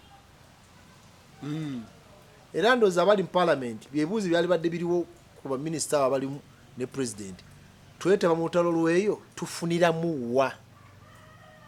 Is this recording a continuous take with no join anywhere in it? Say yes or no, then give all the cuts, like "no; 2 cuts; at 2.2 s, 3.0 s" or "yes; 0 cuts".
yes; 0 cuts